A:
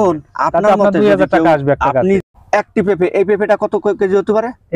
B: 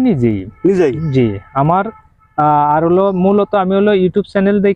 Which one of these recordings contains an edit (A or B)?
A